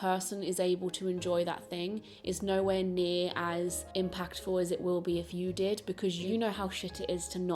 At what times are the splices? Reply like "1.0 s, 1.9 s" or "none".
3.8 s, 6.2 s